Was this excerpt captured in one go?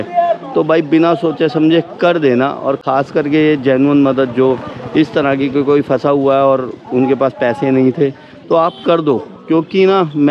yes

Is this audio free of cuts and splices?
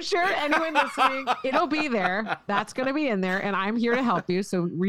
yes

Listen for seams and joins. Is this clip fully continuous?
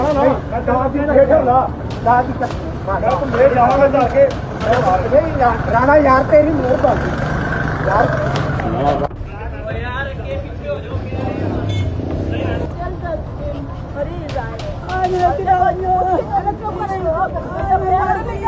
yes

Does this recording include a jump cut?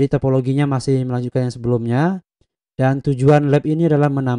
no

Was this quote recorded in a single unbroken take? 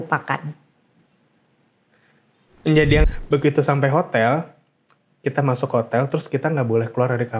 no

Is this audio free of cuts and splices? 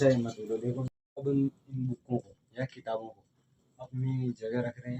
no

